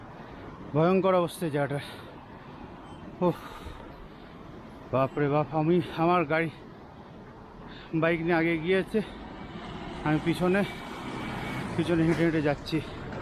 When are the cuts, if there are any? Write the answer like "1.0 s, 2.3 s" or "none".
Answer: none